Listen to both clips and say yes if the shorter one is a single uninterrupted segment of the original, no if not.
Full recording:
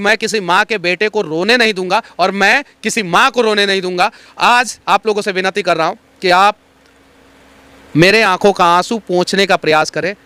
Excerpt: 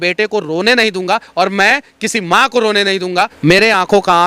no